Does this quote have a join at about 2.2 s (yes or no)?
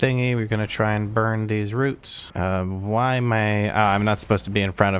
yes